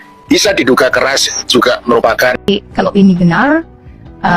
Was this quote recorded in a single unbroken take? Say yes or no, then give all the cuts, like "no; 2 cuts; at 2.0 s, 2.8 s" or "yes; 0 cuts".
no; 1 cut; at 2.4 s